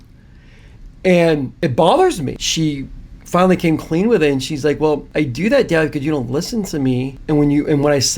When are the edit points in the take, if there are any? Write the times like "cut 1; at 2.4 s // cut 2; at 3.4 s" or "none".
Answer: cut 1; at 1.5 s // cut 2; at 2.3 s // cut 3; at 5.1 s // cut 4; at 7.2 s

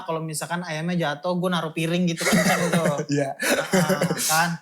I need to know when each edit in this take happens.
none

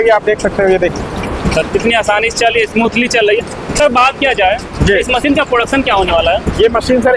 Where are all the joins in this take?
none

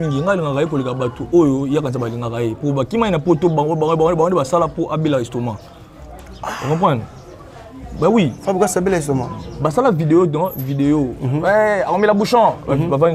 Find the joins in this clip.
none

